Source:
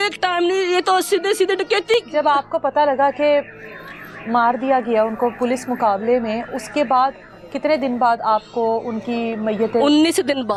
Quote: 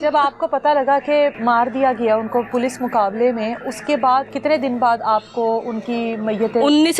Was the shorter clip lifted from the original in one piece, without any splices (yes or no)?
no